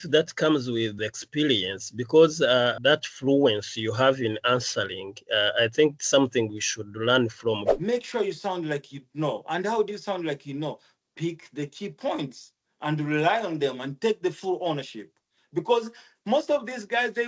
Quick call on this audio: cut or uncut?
cut